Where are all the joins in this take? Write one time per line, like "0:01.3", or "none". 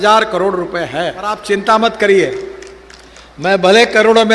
0:01.4